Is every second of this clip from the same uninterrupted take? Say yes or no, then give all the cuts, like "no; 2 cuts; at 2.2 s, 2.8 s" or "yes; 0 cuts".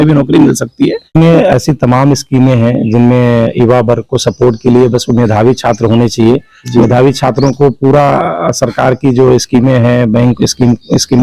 no; 1 cut; at 1.1 s